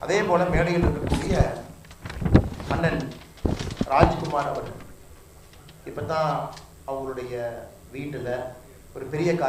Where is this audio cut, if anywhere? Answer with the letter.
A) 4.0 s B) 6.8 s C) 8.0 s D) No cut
D